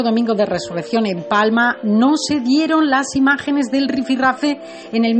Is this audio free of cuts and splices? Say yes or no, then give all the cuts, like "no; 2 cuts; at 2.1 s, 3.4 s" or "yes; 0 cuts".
yes; 0 cuts